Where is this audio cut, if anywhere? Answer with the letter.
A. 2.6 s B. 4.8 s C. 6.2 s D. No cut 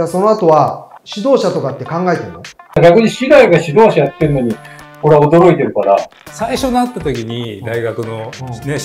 C